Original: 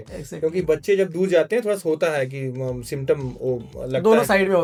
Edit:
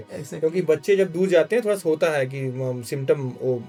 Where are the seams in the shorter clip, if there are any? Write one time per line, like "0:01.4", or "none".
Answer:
none